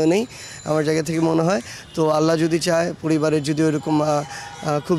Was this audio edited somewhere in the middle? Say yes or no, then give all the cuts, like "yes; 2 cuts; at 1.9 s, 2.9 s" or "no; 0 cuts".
no; 0 cuts